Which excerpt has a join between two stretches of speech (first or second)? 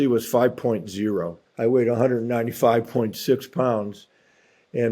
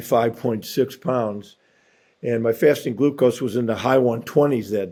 first